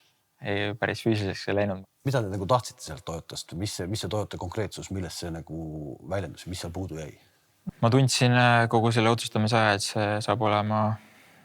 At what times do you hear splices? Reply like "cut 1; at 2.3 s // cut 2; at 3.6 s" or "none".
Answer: cut 1; at 1.8 s // cut 2; at 7.6 s